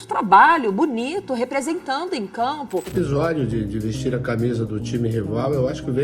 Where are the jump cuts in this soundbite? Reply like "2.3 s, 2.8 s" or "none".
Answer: 2.9 s